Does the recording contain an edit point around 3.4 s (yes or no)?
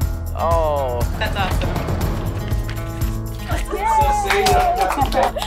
yes